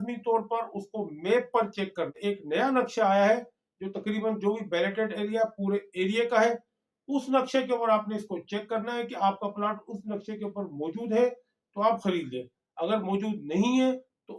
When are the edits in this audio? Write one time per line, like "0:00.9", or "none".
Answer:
0:02.2